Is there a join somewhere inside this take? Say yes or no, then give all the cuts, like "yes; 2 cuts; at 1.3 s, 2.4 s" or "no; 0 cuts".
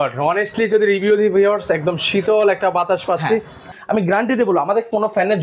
yes; 1 cut; at 3.6 s